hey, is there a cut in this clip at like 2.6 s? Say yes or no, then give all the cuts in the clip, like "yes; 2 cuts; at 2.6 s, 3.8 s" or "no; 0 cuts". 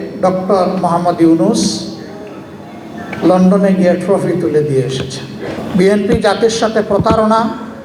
no; 1 cut; at 5.6 s